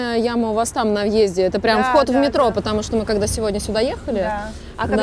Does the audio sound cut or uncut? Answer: uncut